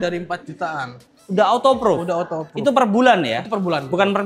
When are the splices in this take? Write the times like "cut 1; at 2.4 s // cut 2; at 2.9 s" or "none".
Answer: none